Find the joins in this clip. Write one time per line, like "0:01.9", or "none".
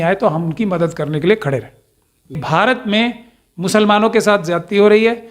0:02.3